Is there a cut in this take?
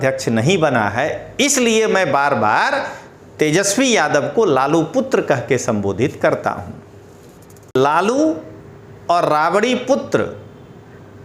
yes; 1 cut; at 7.8 s

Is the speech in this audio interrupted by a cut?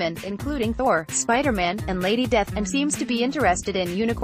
yes; 1 cut; at 2.5 s

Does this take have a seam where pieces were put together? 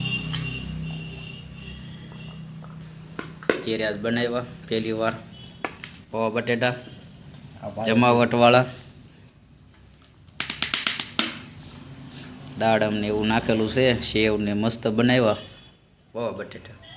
no; 0 cuts

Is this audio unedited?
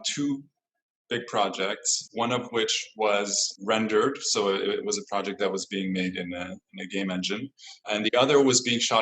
no; 2 cuts; at 3.5 s, 7.9 s

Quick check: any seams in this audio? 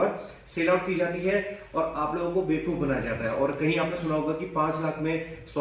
no; 0 cuts

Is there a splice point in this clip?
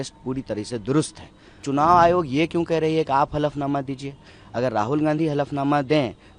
yes; 1 cut; at 1.6 s

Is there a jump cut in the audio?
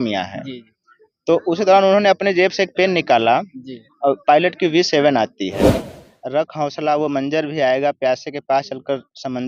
yes; 1 cut; at 5.7 s

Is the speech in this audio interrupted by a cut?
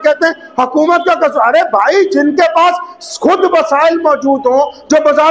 no; 0 cuts

